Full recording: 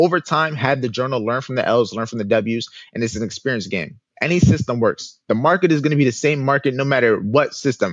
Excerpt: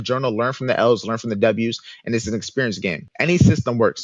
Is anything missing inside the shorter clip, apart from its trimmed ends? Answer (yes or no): yes